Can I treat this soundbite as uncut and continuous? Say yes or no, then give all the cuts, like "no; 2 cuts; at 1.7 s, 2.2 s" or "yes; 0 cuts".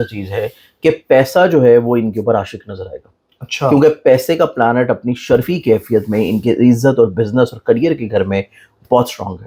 yes; 0 cuts